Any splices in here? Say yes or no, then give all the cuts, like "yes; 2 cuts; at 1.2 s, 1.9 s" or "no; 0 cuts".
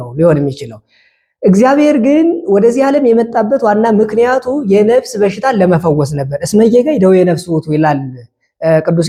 no; 0 cuts